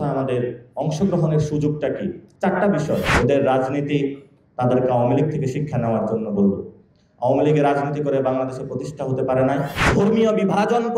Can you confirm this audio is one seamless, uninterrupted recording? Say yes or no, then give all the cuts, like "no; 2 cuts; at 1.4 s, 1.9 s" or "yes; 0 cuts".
no; 3 cuts; at 2.2 s, 3.1 s, 9.8 s